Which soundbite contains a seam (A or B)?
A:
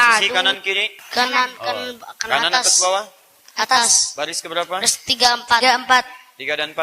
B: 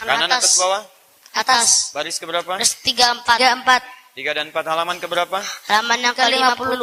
A